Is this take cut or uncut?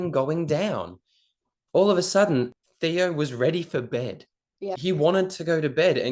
cut